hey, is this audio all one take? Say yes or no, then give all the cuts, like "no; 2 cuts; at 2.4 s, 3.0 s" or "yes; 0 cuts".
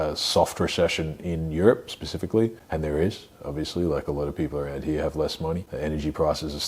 no; 2 cuts; at 2.6 s, 5.7 s